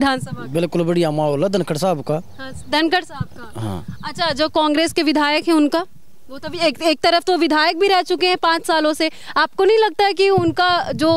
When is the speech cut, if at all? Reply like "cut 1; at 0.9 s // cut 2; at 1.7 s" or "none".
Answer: none